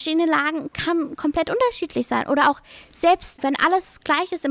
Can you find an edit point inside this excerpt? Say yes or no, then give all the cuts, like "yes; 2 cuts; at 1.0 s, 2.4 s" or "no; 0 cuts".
yes; 1 cut; at 3.4 s